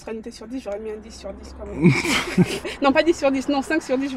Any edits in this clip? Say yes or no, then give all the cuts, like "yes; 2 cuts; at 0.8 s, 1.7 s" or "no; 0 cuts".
yes; 1 cut; at 2.6 s